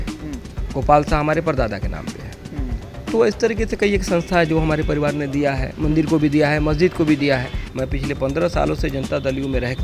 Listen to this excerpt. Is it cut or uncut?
cut